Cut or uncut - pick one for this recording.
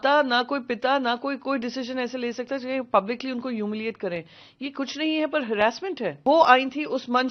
cut